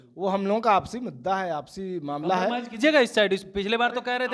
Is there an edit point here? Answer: no; 0 cuts

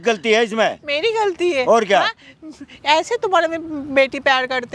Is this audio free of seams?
yes; 0 cuts

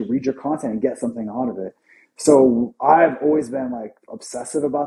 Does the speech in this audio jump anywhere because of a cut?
no; 0 cuts

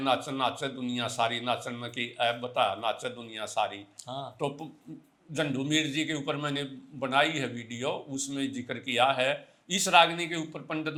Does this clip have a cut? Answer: no; 0 cuts

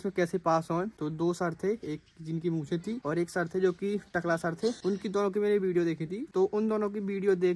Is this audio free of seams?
yes; 0 cuts

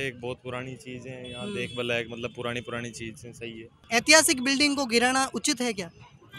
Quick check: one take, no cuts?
no; 1 cut; at 3.8 s

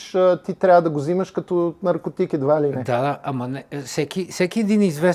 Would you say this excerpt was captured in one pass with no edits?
yes; 0 cuts

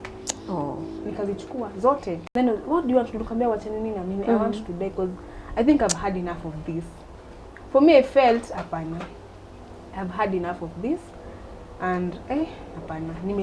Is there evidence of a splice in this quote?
yes; 1 cut; at 2.2 s

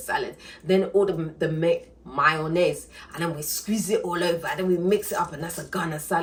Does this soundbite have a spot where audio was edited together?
no; 0 cuts

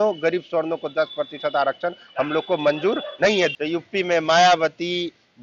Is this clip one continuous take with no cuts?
no; 1 cut; at 3.5 s

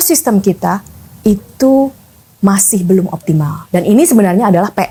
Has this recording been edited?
no; 0 cuts

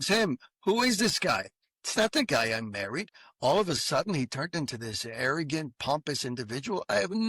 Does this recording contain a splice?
no; 0 cuts

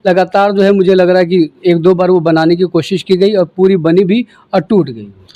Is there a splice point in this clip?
no; 0 cuts

